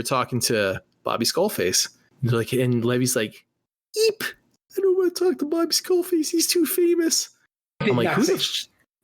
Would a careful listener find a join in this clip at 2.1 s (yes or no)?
yes